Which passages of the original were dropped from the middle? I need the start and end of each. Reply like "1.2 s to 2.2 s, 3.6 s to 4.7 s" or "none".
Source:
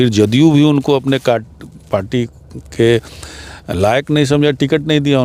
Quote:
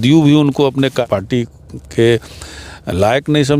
1.3 s to 1.8 s